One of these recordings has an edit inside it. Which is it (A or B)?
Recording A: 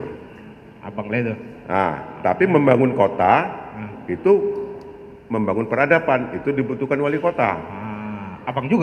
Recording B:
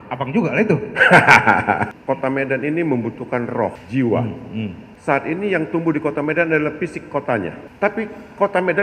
B